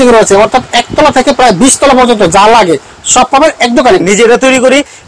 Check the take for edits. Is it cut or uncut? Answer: cut